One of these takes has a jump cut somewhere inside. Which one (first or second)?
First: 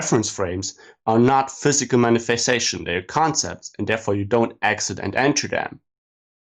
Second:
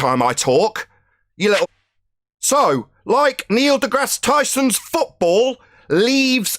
second